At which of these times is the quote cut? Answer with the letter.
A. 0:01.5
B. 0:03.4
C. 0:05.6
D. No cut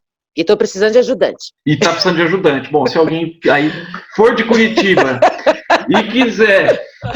A